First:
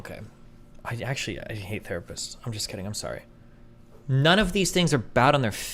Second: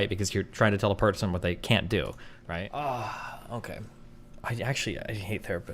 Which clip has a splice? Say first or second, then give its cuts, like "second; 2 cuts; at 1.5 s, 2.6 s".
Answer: second; 1 cut; at 2.4 s